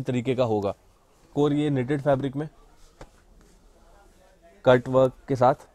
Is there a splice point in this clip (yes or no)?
yes